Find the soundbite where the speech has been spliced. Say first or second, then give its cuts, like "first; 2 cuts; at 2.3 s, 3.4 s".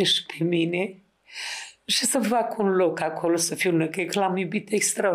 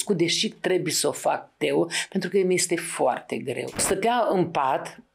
second; 1 cut; at 3.8 s